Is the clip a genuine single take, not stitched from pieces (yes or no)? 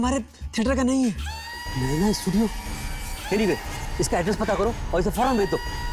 no